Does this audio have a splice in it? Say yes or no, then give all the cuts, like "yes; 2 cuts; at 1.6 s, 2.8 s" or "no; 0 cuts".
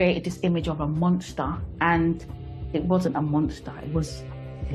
no; 0 cuts